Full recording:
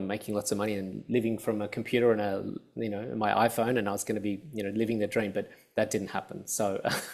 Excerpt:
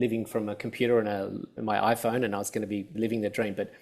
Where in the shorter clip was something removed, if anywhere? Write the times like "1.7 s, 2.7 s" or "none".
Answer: 1.5 s, 2.9 s